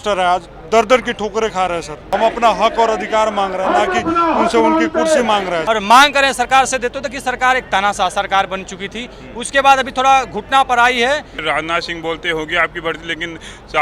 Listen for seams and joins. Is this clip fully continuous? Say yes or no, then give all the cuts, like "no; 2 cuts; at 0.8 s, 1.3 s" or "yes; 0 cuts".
no; 3 cuts; at 2.1 s, 5.6 s, 11.4 s